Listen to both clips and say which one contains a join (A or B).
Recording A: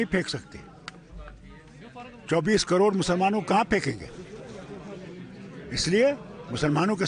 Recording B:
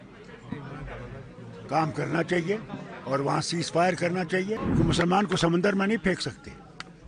B